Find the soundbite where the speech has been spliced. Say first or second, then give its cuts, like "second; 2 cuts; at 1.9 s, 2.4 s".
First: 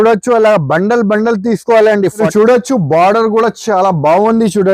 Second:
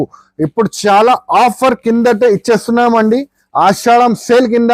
first; 1 cut; at 2.2 s